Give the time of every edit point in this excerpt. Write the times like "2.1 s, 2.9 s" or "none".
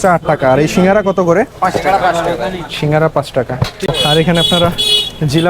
3.9 s